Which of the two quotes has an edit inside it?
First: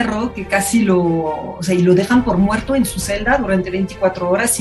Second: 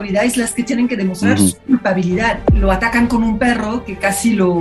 second; 1 cut; at 2.4 s

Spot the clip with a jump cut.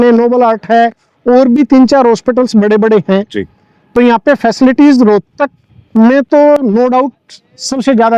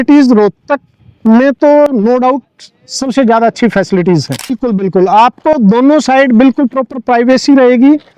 second; 1 cut; at 4.6 s

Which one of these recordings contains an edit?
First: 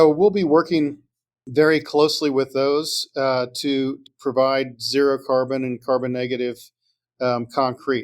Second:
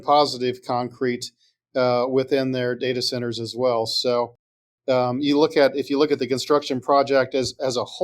first; 1 cut; at 4.1 s

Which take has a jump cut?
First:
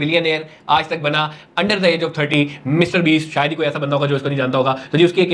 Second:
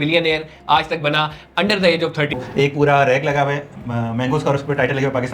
second; 1 cut; at 2.3 s

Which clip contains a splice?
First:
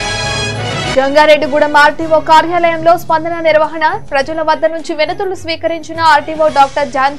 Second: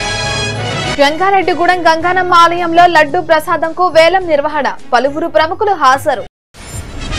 first; 1 cut; at 0.9 s

